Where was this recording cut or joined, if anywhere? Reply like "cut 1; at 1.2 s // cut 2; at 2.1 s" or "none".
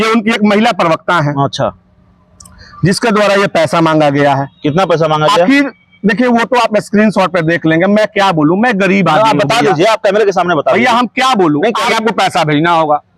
cut 1; at 11.9 s

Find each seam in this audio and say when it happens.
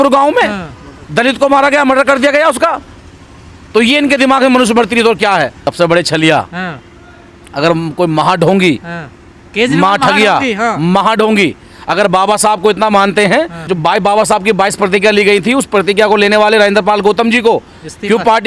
cut 1; at 5.7 s

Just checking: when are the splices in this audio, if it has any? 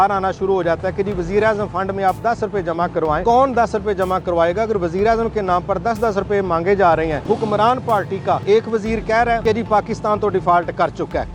cut 1; at 3.2 s // cut 2; at 7.2 s // cut 3; at 8.4 s // cut 4; at 9.4 s

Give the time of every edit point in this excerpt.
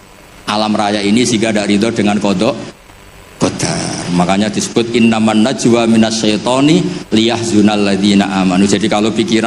none

